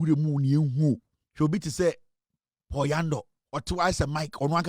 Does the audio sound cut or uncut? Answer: cut